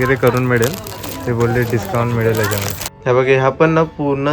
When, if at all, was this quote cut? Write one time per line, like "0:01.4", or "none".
0:02.8